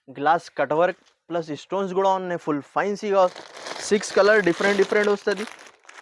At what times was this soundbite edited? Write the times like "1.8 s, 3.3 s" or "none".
3.4 s